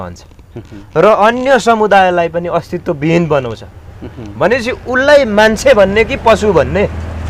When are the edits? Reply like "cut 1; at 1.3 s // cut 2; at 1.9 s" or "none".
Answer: none